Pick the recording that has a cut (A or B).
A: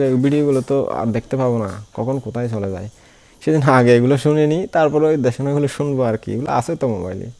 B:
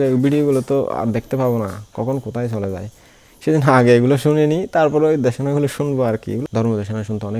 B